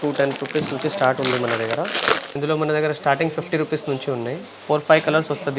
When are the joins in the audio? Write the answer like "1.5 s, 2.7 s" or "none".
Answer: 2.3 s, 4.5 s